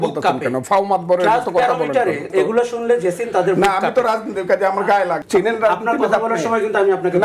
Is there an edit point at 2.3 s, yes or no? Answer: yes